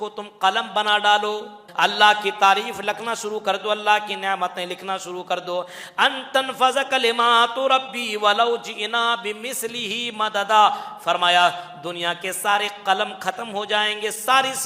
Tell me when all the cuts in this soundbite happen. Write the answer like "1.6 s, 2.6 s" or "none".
1.6 s